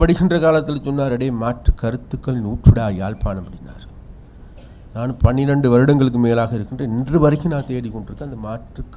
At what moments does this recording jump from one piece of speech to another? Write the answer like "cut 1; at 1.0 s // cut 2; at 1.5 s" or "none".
none